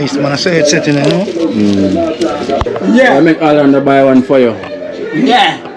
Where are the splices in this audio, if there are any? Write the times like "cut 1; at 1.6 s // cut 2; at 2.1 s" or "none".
cut 1; at 2.7 s